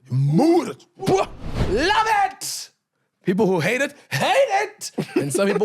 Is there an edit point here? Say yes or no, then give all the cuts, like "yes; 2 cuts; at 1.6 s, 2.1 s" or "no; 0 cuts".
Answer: yes; 1 cut; at 1.6 s